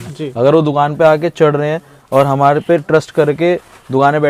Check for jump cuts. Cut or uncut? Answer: uncut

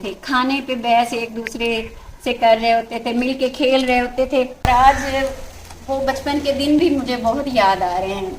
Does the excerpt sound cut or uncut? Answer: cut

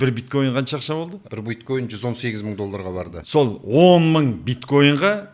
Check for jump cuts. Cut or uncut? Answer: cut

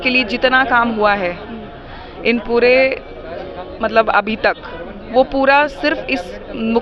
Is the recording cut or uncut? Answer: uncut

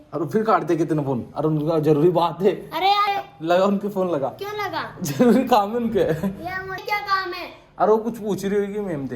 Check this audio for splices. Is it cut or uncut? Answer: cut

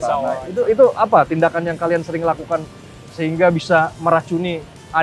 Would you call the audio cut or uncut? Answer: uncut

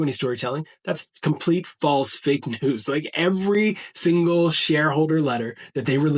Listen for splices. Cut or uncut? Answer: uncut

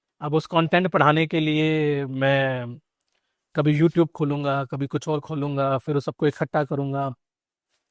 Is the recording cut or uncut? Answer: uncut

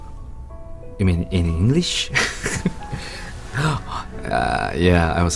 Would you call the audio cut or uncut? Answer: uncut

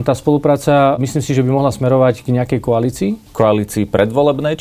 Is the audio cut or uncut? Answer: cut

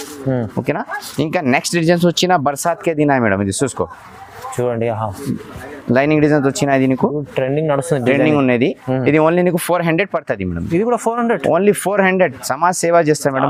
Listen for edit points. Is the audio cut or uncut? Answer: uncut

